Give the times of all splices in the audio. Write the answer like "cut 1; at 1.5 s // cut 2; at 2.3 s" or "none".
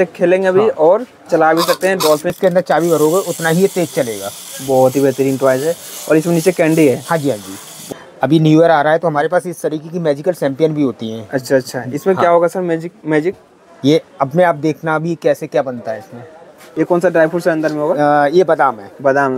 cut 1; at 2.3 s // cut 2; at 7.9 s // cut 3; at 16.6 s

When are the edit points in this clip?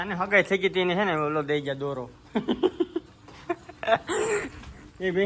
cut 1; at 2.3 s

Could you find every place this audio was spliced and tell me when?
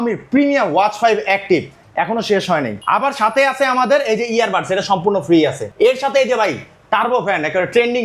cut 1; at 1.8 s // cut 2; at 2.8 s // cut 3; at 5.6 s

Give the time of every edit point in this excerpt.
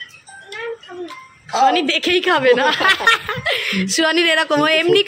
none

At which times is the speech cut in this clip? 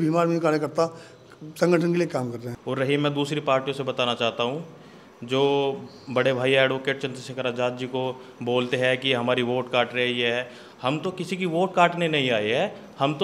cut 1; at 2.5 s

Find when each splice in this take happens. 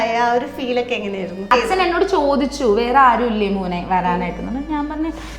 cut 1; at 1.5 s

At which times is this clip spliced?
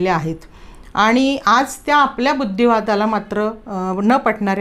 none

